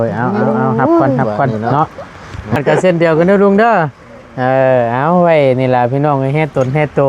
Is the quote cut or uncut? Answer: cut